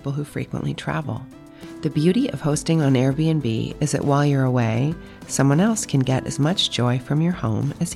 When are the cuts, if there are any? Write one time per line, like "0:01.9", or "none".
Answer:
none